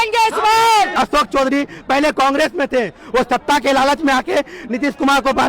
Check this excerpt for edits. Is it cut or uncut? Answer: cut